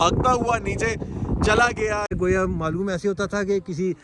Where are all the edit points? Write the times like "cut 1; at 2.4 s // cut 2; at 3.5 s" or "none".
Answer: cut 1; at 2.1 s

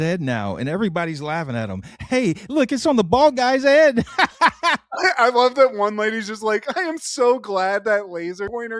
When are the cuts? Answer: none

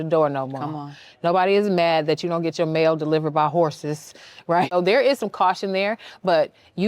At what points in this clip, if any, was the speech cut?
cut 1; at 4.7 s

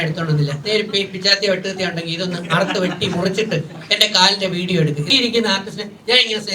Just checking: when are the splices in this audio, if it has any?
cut 1; at 5.1 s

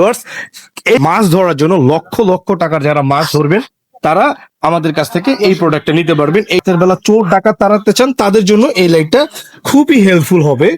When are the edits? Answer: cut 1; at 1.0 s // cut 2; at 6.6 s

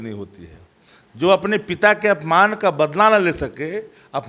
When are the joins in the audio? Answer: none

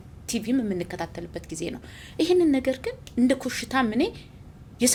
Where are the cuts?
none

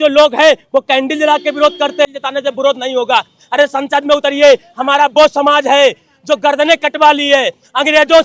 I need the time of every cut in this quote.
cut 1; at 2.1 s

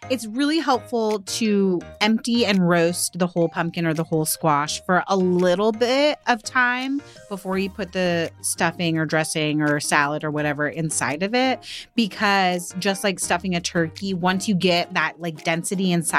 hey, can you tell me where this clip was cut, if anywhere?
cut 1; at 1.9 s

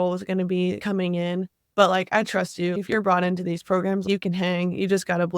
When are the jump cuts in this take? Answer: cut 1; at 0.8 s // cut 2; at 2.7 s // cut 3; at 4.0 s

